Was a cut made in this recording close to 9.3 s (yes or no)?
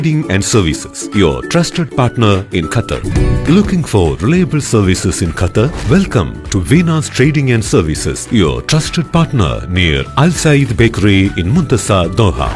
no